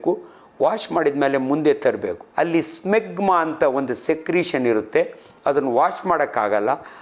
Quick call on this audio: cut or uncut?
cut